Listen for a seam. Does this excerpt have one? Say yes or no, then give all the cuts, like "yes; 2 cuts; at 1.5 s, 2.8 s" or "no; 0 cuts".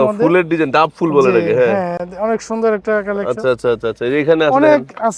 no; 0 cuts